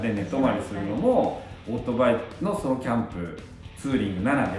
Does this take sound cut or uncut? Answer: uncut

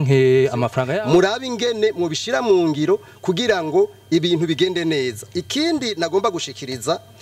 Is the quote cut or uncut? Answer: cut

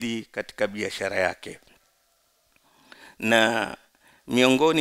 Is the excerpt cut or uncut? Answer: uncut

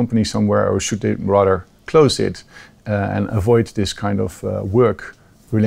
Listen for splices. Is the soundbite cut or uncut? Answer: uncut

